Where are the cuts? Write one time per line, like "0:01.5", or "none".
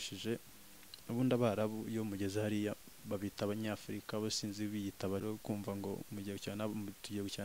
0:05.2